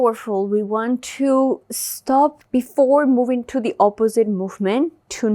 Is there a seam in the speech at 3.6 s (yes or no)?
no